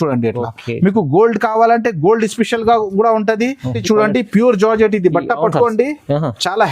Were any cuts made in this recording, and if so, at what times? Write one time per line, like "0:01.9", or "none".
0:03.8